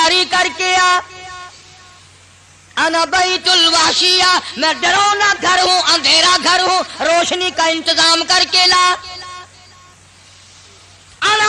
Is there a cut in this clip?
no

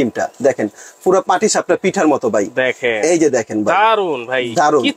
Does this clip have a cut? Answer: no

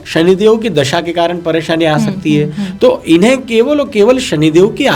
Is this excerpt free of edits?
yes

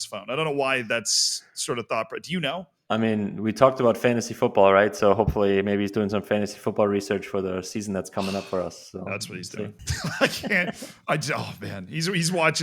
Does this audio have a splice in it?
yes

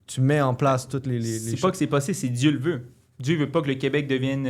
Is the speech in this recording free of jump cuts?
yes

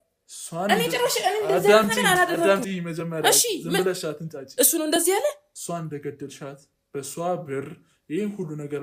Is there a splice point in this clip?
no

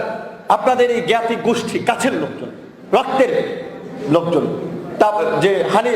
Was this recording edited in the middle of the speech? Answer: no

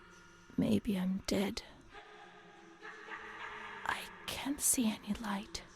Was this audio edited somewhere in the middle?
no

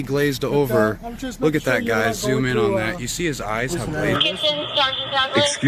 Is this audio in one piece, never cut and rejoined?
no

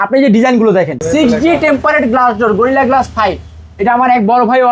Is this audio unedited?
no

